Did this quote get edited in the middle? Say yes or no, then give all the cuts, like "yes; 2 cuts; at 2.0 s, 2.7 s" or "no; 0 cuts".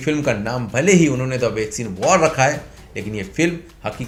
no; 0 cuts